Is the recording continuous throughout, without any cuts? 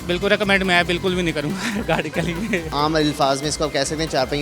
no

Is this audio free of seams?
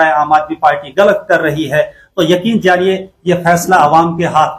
yes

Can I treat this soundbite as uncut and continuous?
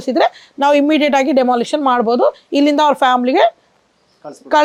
yes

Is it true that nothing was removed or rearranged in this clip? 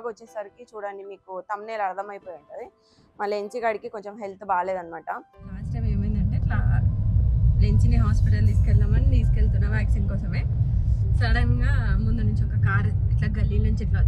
no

